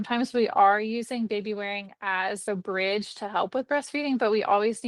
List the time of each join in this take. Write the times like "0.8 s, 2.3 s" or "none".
2.4 s